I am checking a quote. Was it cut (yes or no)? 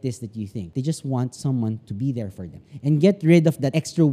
yes